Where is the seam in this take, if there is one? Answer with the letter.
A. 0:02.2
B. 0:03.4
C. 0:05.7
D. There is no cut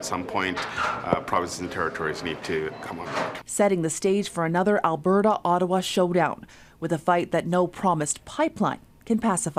D